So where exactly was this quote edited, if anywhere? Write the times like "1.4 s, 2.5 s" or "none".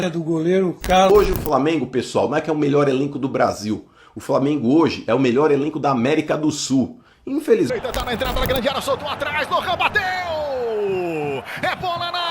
1.1 s, 7.7 s